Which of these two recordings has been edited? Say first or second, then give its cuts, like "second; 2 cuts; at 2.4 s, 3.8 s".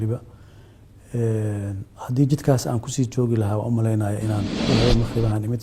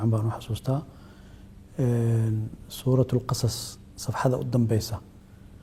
first; 1 cut; at 4.7 s